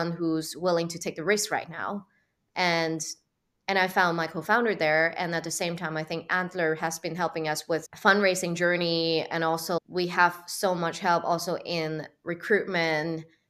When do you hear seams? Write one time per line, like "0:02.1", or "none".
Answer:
0:09.8